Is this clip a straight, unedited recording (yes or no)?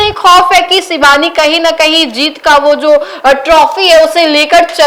yes